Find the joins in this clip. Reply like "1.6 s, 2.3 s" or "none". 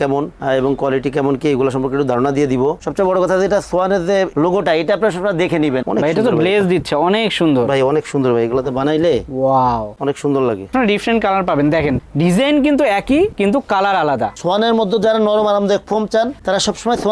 2.8 s, 5.8 s, 10.7 s, 14.3 s